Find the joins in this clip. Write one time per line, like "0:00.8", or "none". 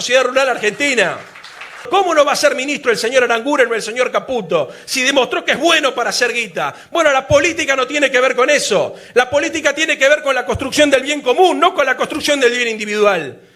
0:01.9